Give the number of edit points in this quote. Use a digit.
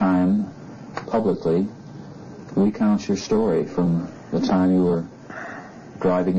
1